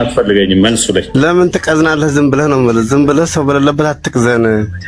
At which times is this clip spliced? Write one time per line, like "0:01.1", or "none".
0:01.1